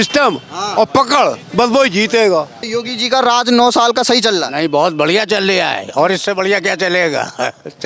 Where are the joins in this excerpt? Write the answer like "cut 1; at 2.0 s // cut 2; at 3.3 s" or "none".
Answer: cut 1; at 2.6 s